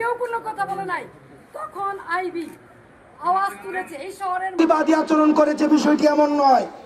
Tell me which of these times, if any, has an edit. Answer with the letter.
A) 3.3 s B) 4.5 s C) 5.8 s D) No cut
B